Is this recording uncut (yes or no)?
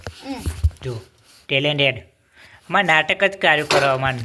yes